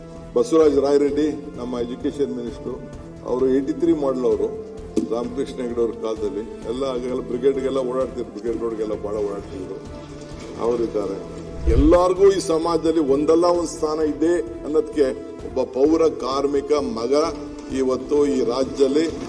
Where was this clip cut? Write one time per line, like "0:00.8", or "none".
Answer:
0:11.6